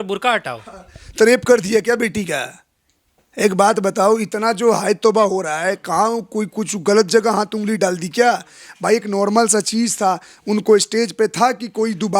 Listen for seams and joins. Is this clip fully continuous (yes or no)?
yes